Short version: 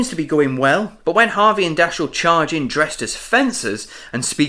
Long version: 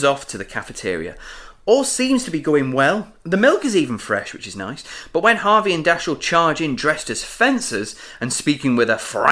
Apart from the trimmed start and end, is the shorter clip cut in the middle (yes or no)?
yes